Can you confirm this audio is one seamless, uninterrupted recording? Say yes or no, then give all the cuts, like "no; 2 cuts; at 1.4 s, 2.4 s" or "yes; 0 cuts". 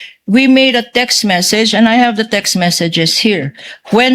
yes; 0 cuts